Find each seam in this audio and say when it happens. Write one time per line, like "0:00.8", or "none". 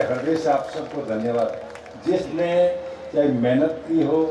none